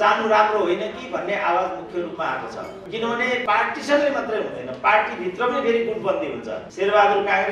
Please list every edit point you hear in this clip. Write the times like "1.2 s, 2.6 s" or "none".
3.3 s, 6.6 s